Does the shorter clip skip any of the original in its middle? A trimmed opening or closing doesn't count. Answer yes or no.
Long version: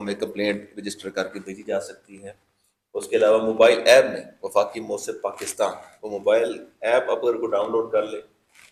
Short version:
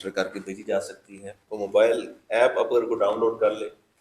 yes